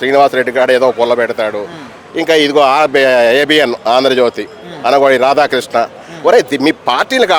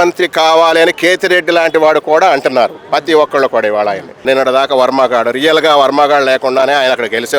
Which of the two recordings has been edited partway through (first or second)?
second